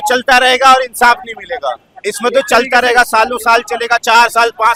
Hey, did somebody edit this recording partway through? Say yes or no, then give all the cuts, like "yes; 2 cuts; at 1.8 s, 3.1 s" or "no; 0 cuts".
no; 0 cuts